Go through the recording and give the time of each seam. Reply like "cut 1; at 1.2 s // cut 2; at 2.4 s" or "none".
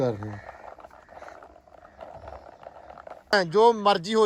cut 1; at 3.3 s